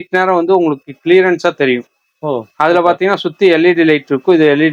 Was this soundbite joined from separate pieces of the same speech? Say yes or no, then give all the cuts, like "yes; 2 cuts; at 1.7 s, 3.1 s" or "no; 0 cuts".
no; 0 cuts